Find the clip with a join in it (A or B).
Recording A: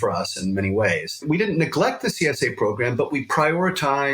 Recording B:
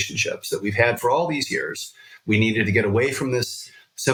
A